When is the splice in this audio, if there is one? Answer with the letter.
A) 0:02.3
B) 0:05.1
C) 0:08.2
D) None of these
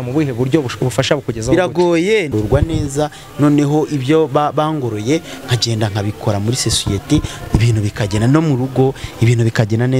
A